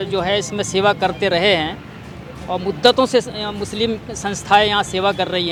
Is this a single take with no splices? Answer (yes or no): yes